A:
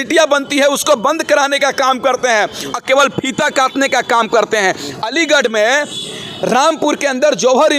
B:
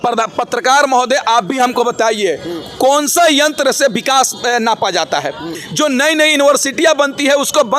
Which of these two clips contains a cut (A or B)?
B